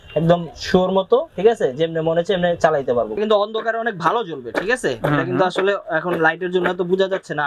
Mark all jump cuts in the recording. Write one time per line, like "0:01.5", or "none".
0:03.2

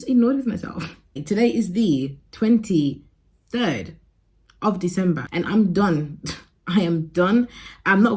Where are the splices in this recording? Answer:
0:01.2
0:05.2

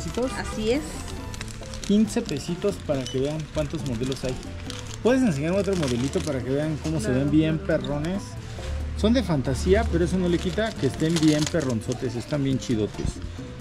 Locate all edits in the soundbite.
none

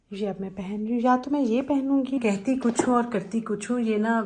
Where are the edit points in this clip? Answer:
0:02.2

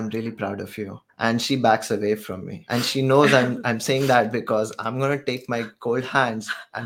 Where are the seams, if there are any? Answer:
0:01.0
0:02.6

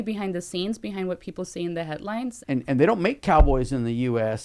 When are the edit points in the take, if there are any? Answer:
0:02.4

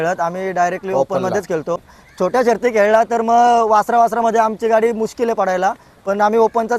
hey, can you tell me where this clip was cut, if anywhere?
0:02.0

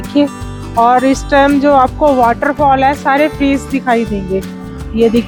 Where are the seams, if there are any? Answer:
none

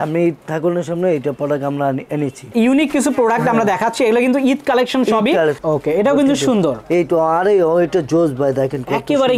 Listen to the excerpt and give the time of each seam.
0:02.5
0:05.6

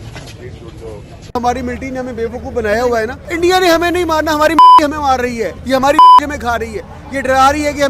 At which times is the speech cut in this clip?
0:01.3

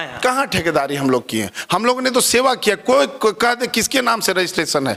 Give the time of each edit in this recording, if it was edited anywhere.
none

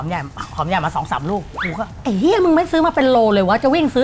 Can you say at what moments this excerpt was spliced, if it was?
0:01.9

